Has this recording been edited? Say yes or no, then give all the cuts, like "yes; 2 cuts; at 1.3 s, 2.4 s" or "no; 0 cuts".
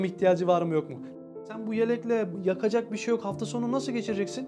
yes; 2 cuts; at 1.1 s, 2.3 s